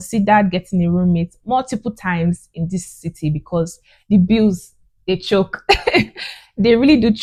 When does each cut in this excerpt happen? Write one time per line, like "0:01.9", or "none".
none